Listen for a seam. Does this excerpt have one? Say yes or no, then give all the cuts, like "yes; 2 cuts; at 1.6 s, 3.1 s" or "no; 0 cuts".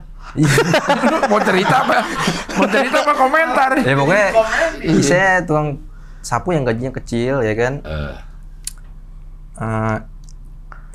no; 0 cuts